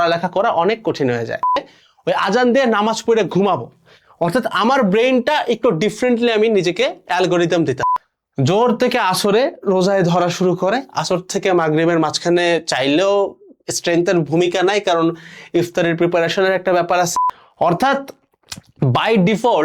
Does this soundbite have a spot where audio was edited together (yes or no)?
yes